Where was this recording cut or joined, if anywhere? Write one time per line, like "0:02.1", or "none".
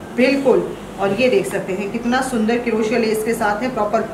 none

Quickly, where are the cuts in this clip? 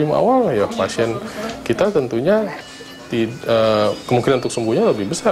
none

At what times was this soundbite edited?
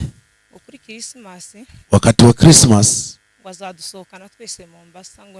none

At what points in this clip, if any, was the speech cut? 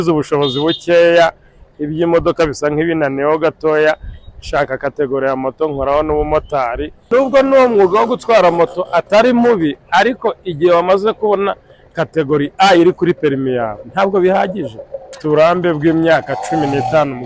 0:07.0
0:15.2

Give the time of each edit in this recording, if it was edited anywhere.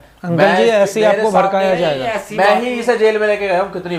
none

